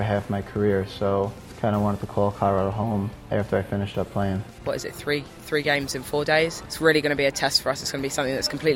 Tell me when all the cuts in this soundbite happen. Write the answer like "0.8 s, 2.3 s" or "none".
1.4 s, 3.2 s, 4.6 s, 6.6 s